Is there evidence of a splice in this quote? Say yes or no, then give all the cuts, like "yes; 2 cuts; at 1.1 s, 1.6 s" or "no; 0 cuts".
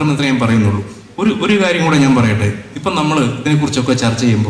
no; 0 cuts